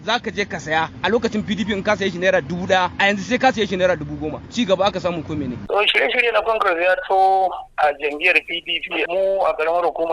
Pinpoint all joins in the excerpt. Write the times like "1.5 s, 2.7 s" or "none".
0.9 s, 2.9 s, 4.4 s, 5.6 s, 9.0 s